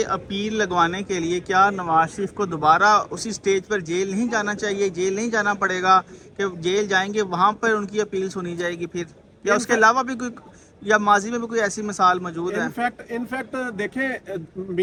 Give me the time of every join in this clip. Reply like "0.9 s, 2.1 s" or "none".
none

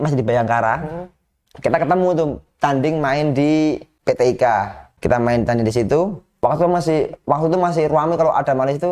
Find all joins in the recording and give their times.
3.9 s, 4.9 s, 6.2 s

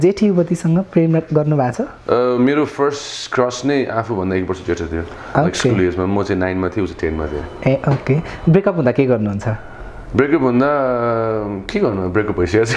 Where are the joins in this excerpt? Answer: none

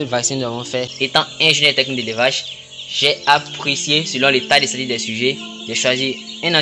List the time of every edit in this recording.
0.9 s

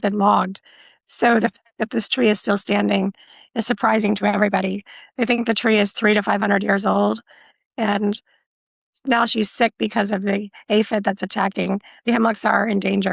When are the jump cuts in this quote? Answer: none

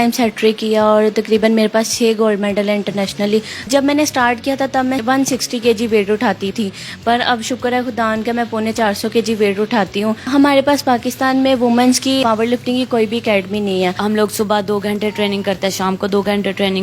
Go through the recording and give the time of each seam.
3.7 s, 5.0 s, 6.5 s, 10.2 s, 12.2 s, 14.0 s

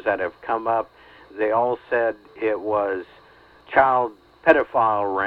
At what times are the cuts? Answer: 3.6 s, 4.2 s

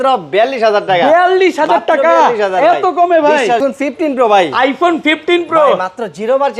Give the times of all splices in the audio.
3.6 s

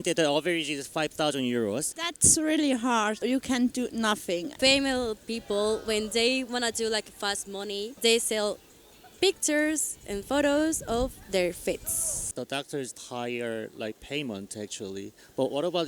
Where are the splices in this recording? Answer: 1.9 s, 4.5 s, 12.2 s

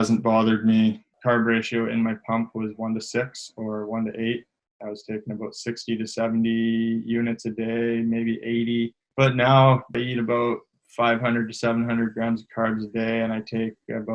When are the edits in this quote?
1.1 s, 9.0 s

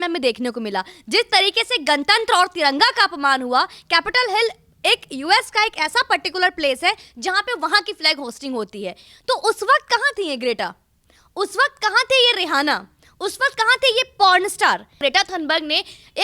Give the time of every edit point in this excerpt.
15.0 s

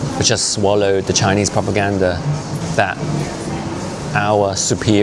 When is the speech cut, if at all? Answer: 2.6 s

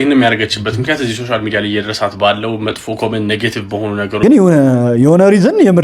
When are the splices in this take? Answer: 4.2 s

